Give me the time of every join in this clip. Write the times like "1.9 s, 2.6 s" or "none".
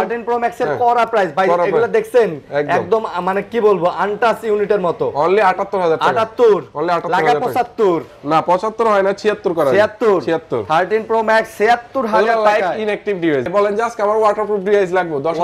13.5 s